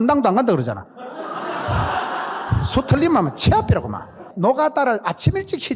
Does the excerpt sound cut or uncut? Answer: cut